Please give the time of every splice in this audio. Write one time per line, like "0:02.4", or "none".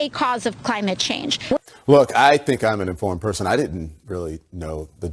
0:01.6